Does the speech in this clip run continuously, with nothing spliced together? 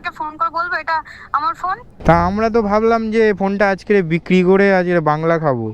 no; 1 cut; at 1.9 s

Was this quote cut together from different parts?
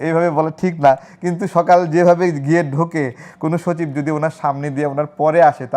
no; 0 cuts

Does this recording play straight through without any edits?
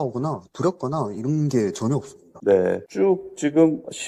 yes; 0 cuts

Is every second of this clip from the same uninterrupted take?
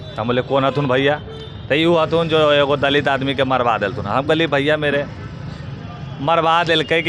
yes; 0 cuts

